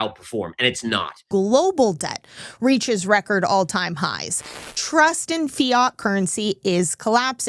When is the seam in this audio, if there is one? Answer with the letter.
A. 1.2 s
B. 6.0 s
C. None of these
A